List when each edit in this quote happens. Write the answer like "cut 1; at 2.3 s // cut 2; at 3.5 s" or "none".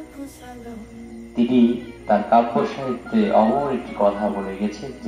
cut 1; at 0.9 s

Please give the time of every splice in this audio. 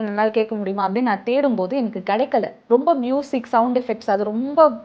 cut 1; at 2.6 s

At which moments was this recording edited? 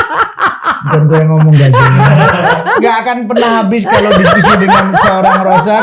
cut 1; at 2.7 s

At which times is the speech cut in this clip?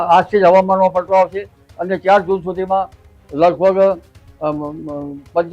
none

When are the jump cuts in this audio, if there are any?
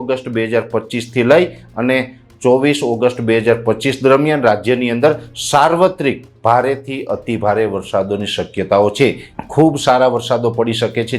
cut 1; at 9.3 s

